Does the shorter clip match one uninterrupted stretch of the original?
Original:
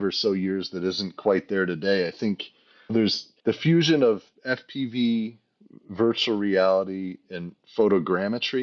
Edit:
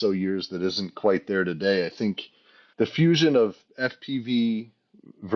no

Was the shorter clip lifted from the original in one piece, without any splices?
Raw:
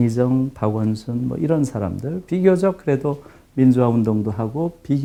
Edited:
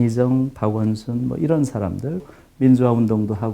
no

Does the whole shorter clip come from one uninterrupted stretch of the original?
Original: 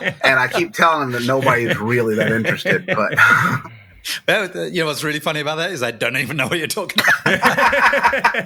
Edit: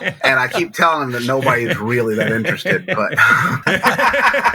no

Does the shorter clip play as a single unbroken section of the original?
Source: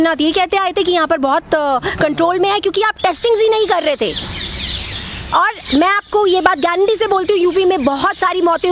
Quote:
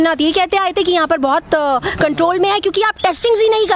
yes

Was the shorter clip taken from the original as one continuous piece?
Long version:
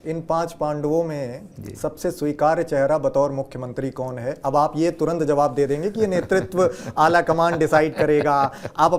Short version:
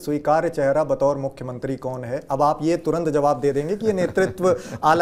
yes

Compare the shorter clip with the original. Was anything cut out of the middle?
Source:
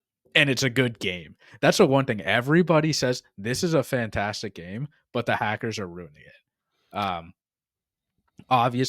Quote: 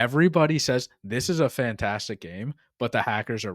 no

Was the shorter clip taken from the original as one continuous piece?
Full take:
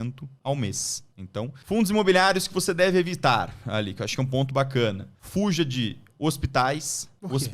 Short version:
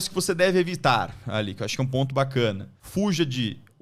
yes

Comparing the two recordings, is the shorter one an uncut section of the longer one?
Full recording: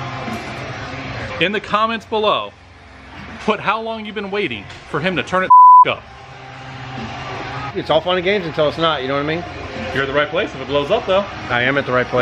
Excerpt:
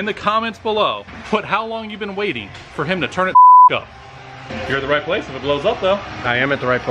no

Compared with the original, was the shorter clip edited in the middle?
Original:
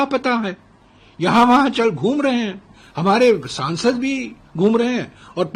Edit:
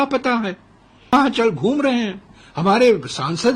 yes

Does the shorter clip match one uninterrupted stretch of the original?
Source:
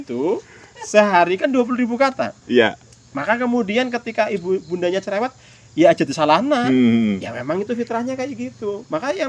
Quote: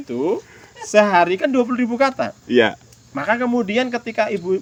yes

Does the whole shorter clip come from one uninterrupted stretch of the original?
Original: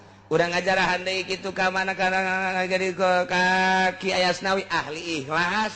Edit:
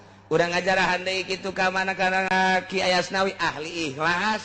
no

